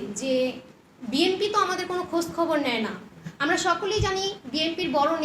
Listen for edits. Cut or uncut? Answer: uncut